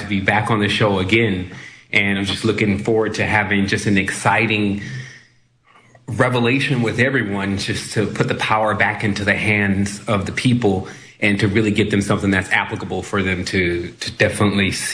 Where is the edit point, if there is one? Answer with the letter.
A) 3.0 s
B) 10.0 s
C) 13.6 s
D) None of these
B